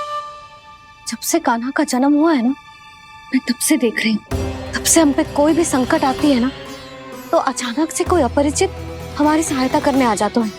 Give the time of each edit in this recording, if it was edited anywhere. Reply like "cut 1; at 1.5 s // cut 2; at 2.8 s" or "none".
cut 1; at 1.0 s